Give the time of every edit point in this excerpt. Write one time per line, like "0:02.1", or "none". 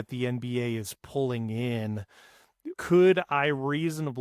0:02.7